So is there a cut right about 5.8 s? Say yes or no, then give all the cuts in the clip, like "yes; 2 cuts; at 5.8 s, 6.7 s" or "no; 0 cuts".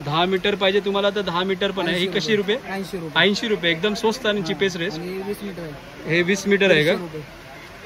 no; 0 cuts